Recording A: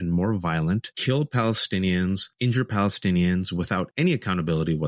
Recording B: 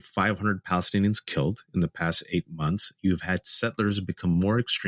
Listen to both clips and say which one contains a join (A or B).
A